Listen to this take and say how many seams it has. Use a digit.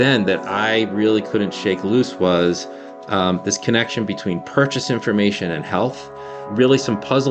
0